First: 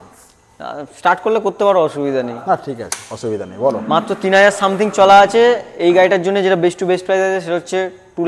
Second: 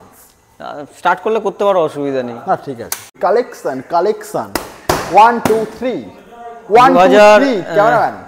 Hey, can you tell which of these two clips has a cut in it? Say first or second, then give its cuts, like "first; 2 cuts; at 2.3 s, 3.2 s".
second; 1 cut; at 3.1 s